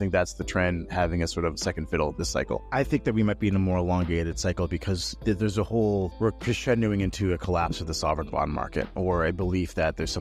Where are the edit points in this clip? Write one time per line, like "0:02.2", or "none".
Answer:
none